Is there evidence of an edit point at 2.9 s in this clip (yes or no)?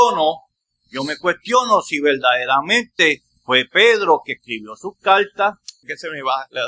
no